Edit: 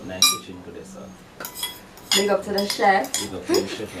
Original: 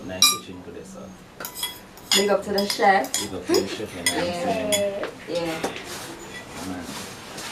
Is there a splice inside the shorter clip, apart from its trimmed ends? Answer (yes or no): no